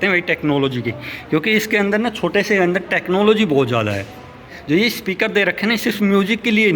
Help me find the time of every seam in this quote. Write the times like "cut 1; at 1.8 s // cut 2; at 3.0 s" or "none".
cut 1; at 4.5 s